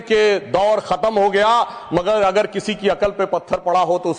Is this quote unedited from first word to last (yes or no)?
yes